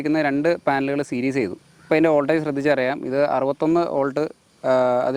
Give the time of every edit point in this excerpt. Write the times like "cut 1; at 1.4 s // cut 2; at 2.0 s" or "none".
none